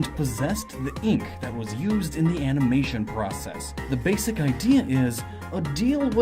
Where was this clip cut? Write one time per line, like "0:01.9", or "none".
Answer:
0:02.6